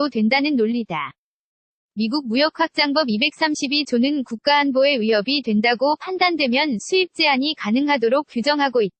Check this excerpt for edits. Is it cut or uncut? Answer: uncut